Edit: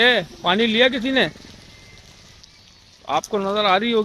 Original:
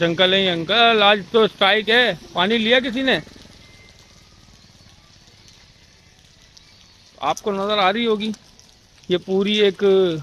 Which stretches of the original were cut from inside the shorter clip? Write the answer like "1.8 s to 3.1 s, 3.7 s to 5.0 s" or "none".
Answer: 4.3 s to 6.5 s